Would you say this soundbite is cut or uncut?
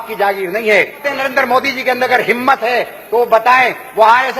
cut